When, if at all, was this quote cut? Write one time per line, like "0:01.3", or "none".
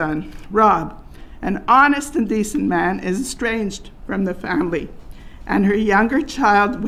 none